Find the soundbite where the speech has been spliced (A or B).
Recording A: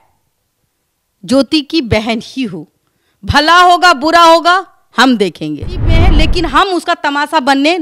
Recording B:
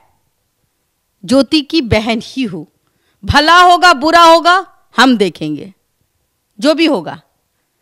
A